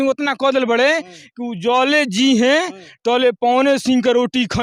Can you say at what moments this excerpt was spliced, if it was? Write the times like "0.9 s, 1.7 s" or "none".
none